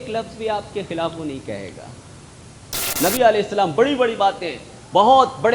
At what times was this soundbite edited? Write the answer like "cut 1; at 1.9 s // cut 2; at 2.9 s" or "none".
cut 1; at 2.8 s